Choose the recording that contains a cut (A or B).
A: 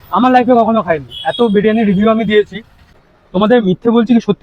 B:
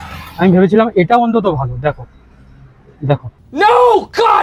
A